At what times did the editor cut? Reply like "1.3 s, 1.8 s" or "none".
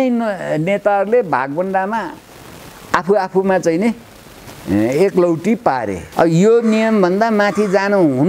6.0 s